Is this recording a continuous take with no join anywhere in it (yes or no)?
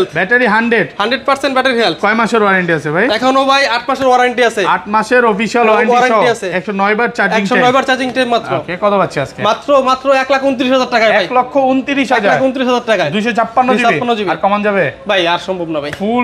yes